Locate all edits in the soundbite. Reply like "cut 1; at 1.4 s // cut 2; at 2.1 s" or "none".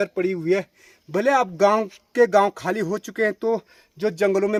none